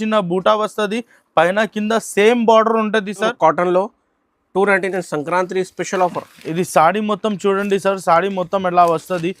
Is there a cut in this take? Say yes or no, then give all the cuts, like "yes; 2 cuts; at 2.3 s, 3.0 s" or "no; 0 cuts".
yes; 1 cut; at 3.3 s